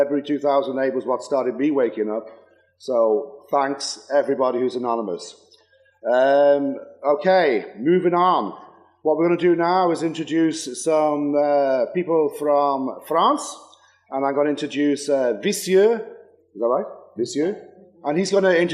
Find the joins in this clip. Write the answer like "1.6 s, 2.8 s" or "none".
6.4 s